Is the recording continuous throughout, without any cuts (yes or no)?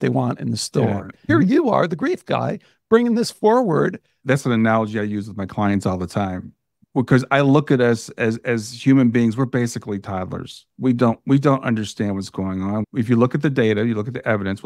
no